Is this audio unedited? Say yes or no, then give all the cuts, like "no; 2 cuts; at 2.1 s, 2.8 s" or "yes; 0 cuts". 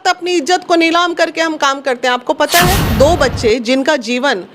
no; 1 cut; at 2.9 s